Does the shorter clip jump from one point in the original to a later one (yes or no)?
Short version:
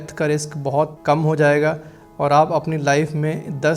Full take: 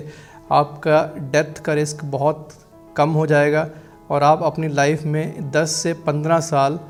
yes